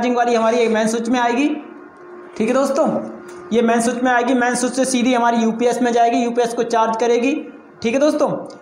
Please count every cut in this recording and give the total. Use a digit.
0